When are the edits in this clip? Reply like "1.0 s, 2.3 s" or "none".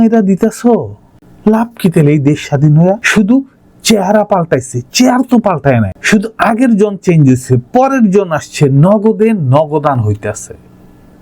3.0 s